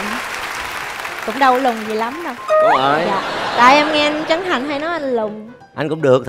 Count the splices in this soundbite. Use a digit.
0